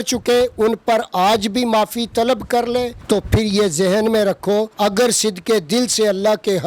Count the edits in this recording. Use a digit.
2